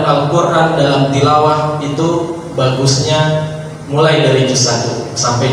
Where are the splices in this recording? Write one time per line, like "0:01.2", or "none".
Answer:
none